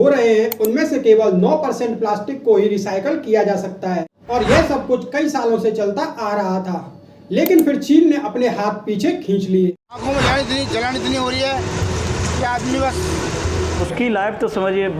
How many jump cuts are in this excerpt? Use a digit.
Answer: 3